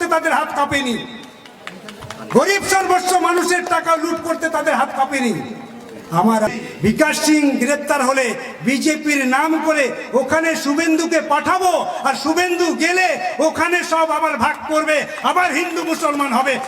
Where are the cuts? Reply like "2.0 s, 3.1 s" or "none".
6.5 s